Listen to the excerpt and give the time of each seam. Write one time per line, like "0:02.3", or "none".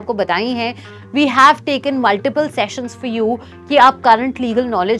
0:00.9

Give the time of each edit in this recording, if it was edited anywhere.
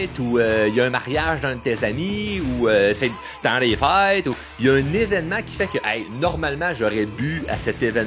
none

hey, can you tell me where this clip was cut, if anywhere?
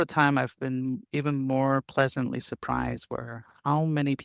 none

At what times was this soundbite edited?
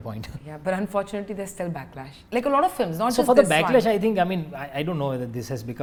none

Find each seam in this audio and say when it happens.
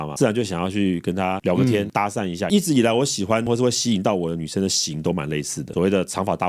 0:02.5
0:05.7

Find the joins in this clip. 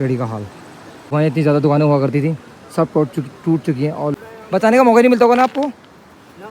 0:01.1
0:04.1

